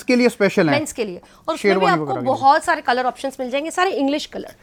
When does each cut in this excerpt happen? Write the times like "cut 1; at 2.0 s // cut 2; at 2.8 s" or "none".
none